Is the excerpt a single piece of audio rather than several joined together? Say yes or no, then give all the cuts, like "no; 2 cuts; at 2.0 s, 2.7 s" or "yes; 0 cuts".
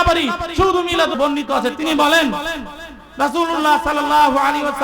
no; 1 cut; at 1.2 s